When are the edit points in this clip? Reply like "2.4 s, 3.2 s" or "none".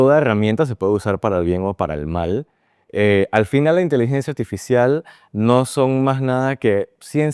none